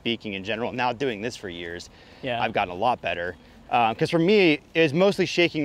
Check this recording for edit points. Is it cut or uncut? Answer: uncut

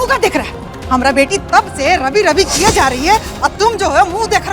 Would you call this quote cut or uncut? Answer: uncut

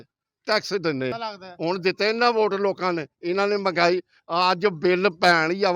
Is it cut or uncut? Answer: cut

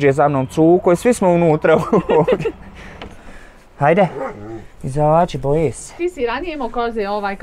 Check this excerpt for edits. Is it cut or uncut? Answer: cut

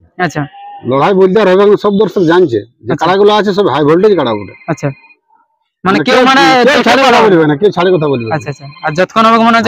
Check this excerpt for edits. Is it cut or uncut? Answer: uncut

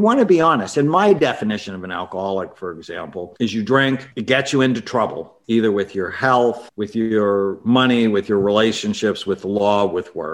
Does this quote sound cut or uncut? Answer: cut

